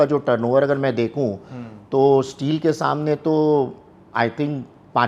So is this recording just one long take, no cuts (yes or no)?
yes